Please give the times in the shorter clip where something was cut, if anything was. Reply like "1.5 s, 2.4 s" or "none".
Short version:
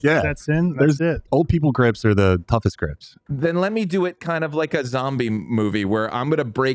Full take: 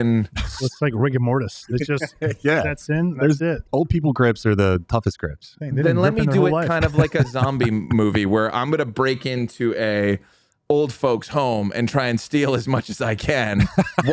none